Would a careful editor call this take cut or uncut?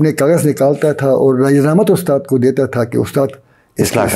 uncut